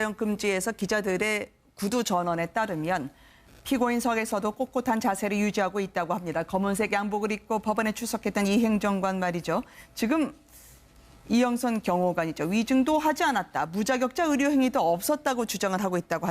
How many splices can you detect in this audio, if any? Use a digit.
1